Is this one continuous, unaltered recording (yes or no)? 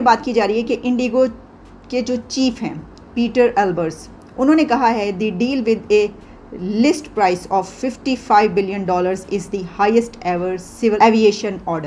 yes